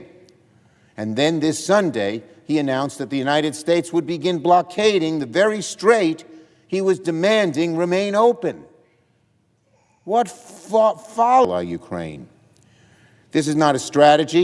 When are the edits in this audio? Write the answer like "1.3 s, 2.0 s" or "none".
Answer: 11.5 s

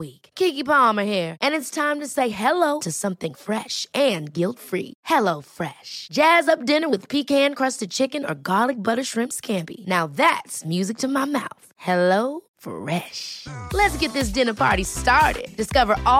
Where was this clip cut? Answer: none

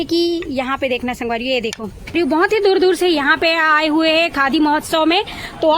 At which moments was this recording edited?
2.1 s

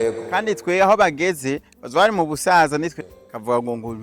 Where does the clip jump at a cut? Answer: 3.0 s

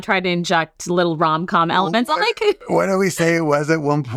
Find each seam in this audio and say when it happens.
none

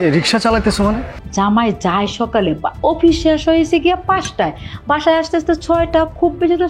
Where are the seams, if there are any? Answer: 1.2 s

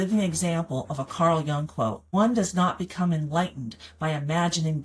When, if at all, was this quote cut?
2.0 s

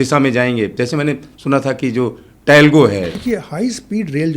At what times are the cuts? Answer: 3.2 s

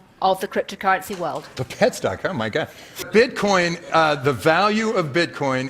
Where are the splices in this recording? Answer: 1.5 s, 3.0 s

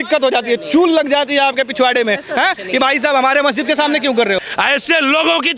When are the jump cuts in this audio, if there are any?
4.4 s

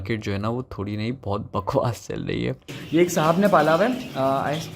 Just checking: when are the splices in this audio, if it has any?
2.7 s

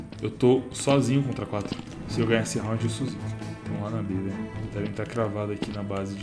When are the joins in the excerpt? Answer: 2.0 s

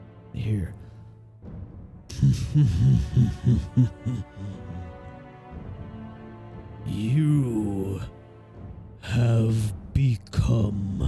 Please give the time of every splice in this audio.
6.8 s

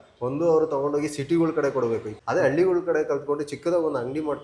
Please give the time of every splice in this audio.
2.1 s

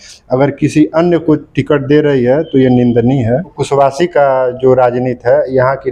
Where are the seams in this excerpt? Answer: 3.6 s

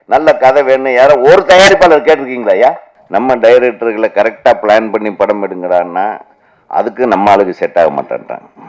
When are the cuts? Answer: 2.9 s

